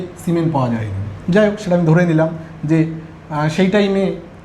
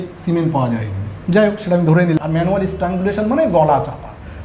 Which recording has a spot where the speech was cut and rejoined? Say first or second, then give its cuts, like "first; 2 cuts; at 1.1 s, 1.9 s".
second; 1 cut; at 2.2 s